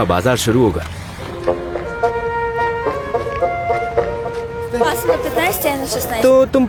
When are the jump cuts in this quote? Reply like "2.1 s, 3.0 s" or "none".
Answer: none